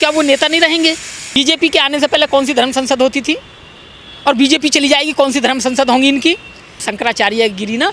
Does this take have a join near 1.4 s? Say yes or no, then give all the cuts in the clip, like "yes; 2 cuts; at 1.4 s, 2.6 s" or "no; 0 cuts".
yes; 2 cuts; at 1.4 s, 6.8 s